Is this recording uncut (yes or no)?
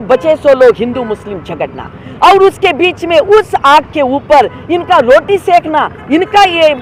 yes